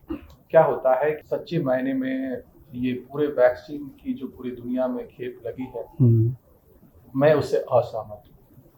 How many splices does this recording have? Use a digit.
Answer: 1